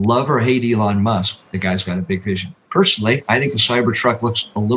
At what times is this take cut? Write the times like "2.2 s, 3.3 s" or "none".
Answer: 2.5 s